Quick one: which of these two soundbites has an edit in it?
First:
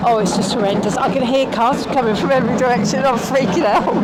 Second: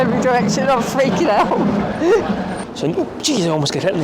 second; 1 cut; at 2.6 s

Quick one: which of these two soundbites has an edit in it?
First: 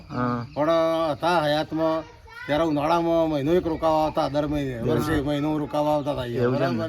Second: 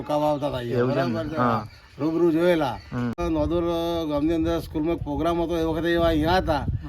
second; 1 cut; at 3.2 s

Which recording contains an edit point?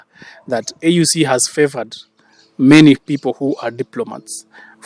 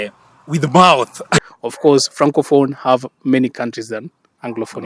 second; 1 cut; at 1.3 s

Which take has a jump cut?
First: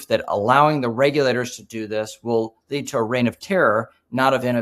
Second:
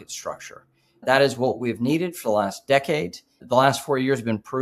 second; 2 cuts; at 1.0 s, 3.4 s

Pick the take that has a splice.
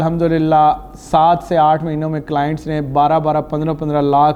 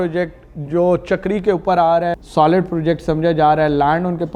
second; 1 cut; at 2.2 s

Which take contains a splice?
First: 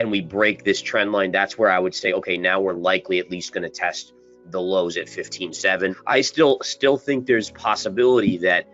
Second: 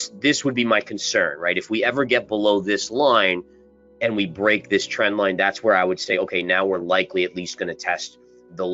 first; 1 cut; at 6.0 s

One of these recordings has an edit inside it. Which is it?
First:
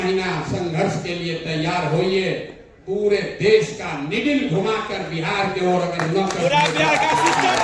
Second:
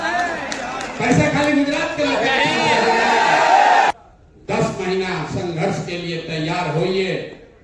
second; 1 cut; at 3.9 s

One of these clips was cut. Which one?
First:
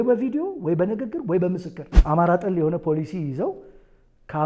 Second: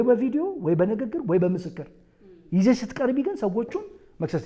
first; 1 cut; at 1.9 s

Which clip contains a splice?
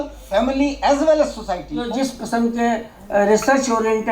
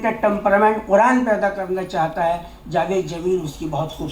first; 1 cut; at 1.7 s

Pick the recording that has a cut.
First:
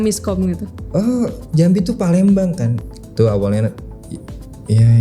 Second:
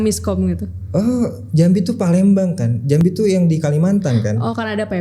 first; 1 cut; at 2.7 s

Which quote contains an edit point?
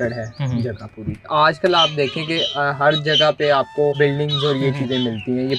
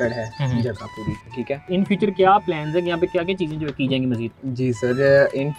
first; 2 cuts; at 1.3 s, 4.0 s

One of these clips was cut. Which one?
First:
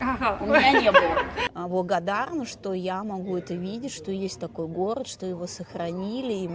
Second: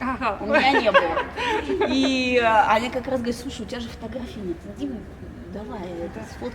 first; 1 cut; at 1.4 s

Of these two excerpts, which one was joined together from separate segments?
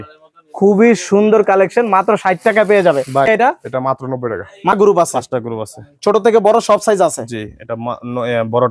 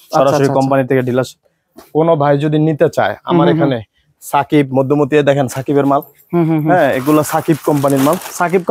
first; 2 cuts; at 3.3 s, 4.7 s

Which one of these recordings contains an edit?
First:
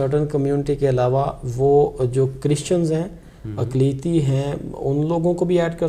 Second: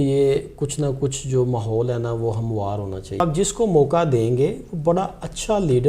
second; 1 cut; at 3.2 s

